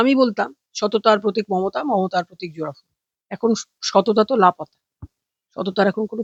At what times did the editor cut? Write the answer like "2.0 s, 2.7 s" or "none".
none